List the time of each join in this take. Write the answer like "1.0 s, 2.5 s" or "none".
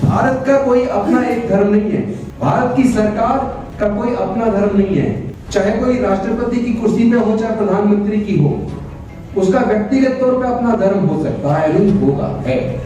2.2 s, 3.6 s, 5.3 s